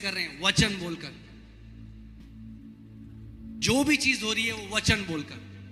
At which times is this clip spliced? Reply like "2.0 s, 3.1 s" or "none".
none